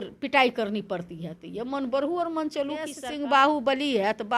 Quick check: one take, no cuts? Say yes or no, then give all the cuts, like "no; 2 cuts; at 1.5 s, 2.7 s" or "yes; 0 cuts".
no; 1 cut; at 3.0 s